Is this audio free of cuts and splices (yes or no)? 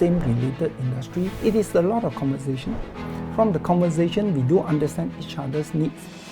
no